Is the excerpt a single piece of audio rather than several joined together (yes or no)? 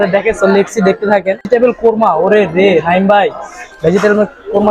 no